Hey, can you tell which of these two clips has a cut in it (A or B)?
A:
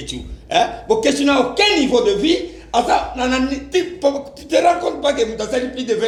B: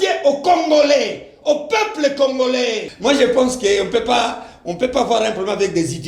B